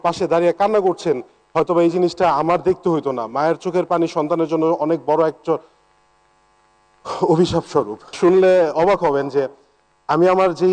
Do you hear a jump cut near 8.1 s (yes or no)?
yes